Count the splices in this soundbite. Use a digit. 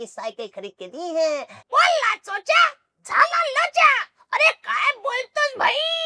1